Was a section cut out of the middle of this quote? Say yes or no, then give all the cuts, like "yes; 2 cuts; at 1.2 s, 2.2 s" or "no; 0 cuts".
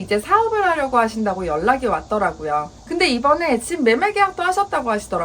yes; 1 cut; at 2.8 s